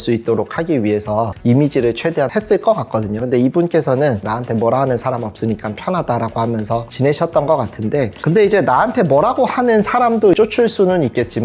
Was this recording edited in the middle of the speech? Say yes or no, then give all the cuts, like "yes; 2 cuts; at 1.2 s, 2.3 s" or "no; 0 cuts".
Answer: yes; 1 cut; at 4.2 s